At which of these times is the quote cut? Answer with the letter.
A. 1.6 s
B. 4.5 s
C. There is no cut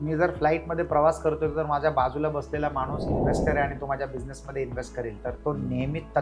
C